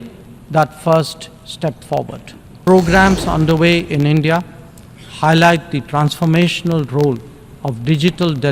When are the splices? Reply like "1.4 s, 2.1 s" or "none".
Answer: 2.7 s

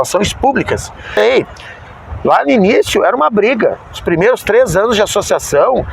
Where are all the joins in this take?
1.2 s

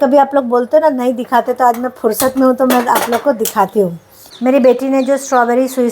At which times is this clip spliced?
4.5 s

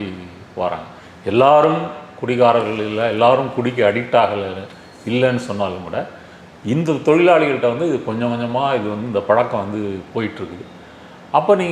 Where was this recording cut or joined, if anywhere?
none

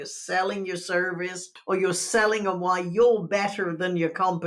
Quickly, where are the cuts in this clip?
1.5 s

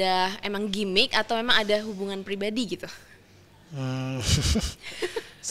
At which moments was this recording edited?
none

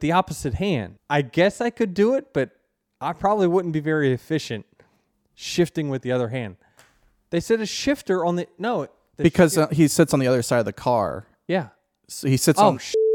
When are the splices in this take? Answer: 0.9 s

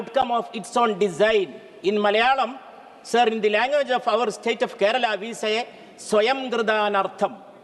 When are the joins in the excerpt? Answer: none

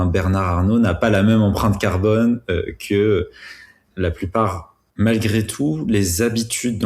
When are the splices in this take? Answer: 4.8 s

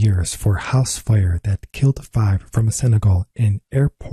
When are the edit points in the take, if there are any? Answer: none

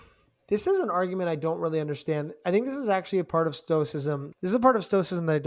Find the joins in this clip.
4.3 s

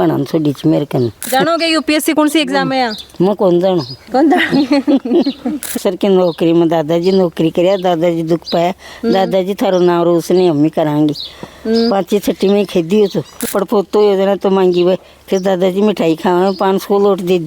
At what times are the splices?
1.3 s, 5.7 s, 13.4 s

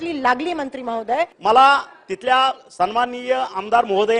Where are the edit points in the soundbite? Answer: 1.3 s

